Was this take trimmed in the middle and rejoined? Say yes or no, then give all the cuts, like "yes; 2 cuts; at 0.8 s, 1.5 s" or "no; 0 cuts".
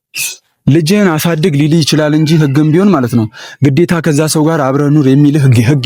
no; 0 cuts